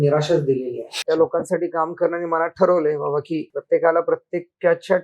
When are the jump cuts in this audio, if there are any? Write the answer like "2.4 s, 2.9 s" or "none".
0.9 s, 3.5 s